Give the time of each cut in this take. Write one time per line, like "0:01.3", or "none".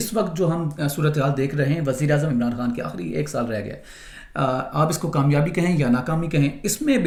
none